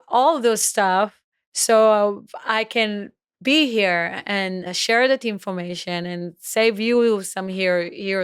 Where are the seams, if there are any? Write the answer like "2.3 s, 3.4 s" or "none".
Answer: 4.7 s